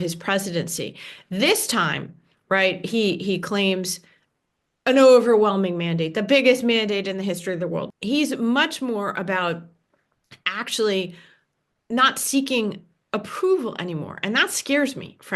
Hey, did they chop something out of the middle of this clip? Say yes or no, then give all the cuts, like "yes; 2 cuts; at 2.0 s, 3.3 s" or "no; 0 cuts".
yes; 1 cut; at 7.9 s